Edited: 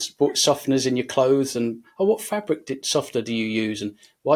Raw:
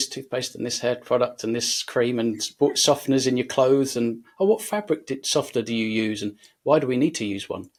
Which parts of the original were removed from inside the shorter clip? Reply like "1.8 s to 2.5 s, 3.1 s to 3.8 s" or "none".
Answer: none